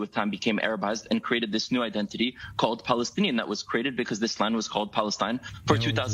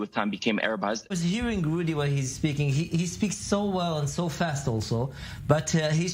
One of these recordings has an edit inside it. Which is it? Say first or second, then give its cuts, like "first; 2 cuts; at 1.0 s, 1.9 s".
second; 1 cut; at 1.0 s